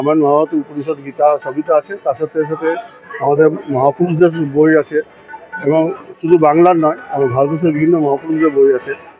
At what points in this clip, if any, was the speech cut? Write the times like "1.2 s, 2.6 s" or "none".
none